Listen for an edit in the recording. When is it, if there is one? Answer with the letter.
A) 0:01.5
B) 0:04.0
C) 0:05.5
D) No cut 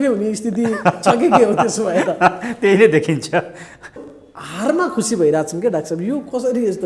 B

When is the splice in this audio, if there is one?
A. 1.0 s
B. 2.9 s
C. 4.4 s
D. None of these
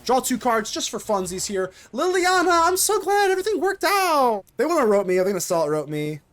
C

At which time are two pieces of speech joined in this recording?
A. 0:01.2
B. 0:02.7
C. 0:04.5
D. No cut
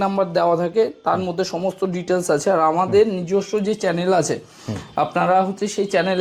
D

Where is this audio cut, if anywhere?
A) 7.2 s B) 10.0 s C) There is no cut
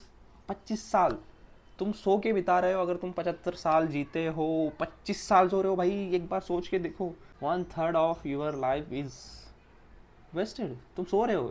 A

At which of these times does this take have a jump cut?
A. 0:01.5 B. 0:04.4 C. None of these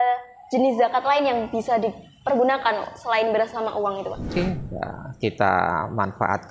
B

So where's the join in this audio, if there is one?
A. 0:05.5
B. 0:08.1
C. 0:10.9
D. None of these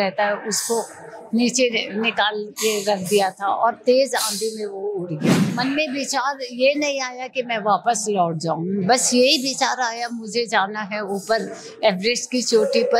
A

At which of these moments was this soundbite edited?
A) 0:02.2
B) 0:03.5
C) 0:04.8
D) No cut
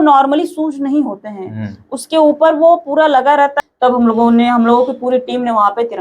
B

